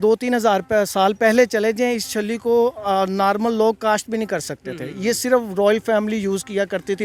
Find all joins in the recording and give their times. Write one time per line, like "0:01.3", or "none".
none